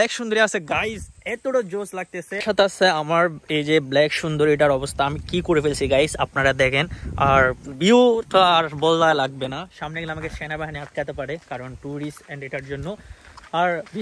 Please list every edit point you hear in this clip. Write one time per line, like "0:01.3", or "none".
0:02.3